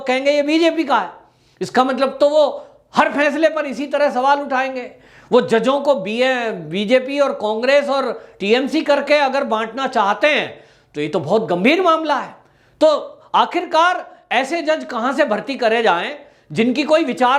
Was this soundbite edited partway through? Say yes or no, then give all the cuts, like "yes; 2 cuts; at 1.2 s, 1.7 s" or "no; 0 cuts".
no; 0 cuts